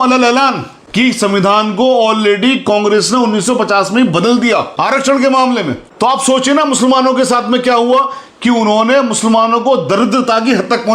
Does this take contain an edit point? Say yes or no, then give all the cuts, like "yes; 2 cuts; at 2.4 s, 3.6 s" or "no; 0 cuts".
yes; 1 cut; at 4.7 s